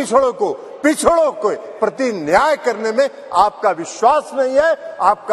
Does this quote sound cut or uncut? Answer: uncut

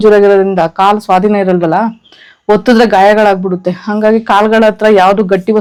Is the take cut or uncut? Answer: uncut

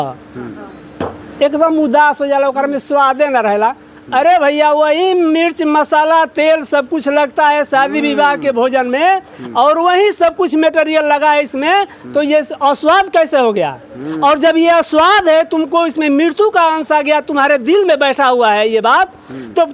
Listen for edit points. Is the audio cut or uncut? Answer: uncut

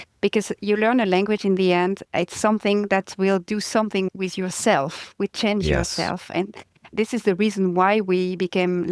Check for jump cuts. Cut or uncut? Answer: uncut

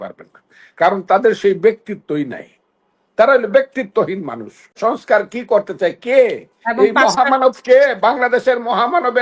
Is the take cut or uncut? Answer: cut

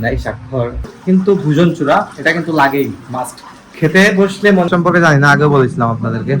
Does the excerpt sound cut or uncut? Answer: cut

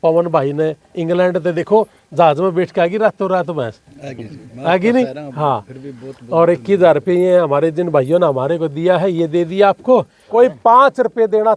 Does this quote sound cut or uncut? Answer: cut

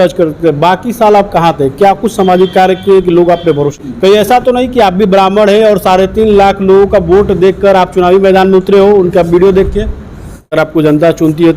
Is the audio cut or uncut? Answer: cut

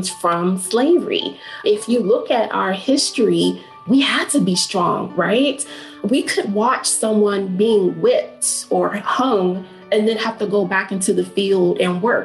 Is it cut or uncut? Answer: cut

